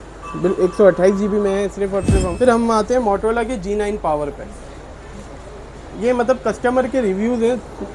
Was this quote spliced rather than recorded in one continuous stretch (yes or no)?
yes